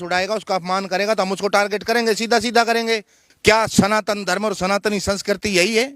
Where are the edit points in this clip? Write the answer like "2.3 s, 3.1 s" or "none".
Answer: 3.2 s